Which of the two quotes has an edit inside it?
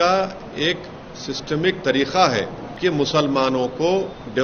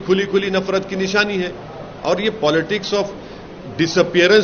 first; 1 cut; at 2.6 s

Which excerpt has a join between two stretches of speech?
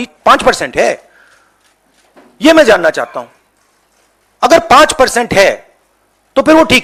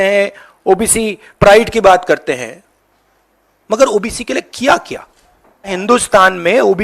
second; 1 cut; at 5.8 s

